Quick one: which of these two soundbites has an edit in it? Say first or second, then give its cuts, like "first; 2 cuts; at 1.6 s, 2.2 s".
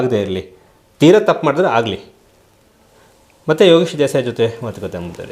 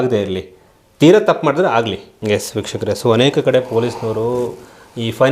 second; 1 cut; at 2.1 s